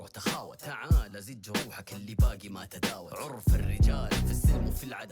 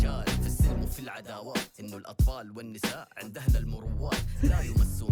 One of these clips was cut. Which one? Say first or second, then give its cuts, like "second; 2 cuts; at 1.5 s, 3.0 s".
first; 1 cut; at 1.0 s